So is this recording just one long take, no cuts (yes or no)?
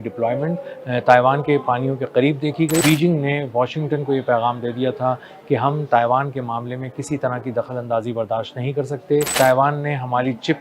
no